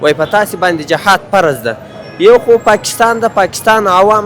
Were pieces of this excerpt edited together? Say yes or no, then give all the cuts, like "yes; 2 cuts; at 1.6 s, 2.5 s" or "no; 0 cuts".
no; 0 cuts